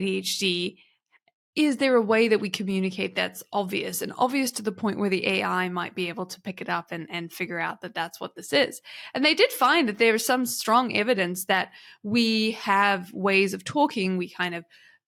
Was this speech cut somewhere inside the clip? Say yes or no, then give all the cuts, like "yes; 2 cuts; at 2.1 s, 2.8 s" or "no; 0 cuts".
no; 0 cuts